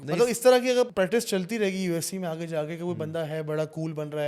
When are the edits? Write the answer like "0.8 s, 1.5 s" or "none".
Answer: 0.9 s